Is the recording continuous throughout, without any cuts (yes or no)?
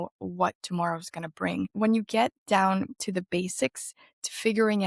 no